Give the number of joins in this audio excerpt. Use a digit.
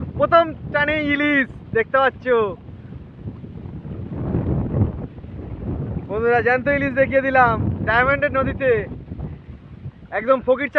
0